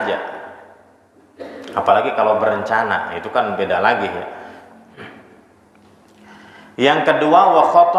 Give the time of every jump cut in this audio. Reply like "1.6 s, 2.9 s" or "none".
5.1 s